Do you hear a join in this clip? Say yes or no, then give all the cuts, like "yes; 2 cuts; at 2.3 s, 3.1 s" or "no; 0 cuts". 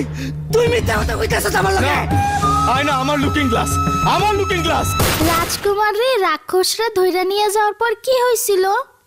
yes; 1 cut; at 5.2 s